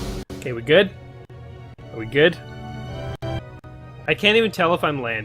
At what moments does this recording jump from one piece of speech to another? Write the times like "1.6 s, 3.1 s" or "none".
3.4 s